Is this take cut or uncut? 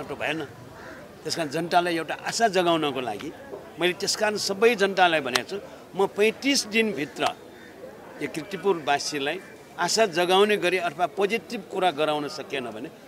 uncut